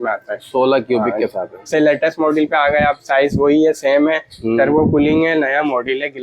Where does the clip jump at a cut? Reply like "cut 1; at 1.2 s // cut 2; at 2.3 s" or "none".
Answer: cut 1; at 1.6 s